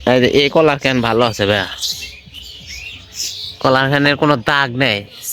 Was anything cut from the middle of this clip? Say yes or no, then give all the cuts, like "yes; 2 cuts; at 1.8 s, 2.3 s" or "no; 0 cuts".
no; 0 cuts